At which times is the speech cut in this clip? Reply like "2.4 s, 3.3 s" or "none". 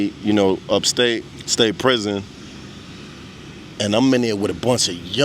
1.4 s